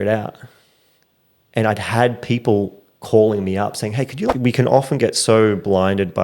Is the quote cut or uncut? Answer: cut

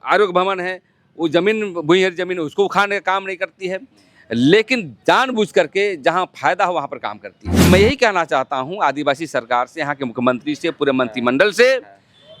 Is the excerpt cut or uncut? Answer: cut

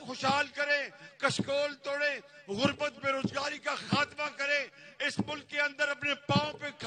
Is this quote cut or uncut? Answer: uncut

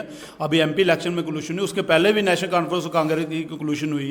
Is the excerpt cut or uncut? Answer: uncut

